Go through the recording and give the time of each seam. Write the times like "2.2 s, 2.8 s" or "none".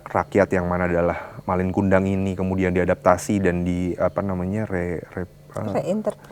none